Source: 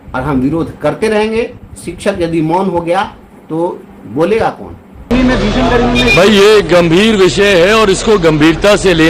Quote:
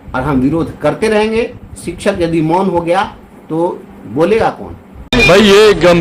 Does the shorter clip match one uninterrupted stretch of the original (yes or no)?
no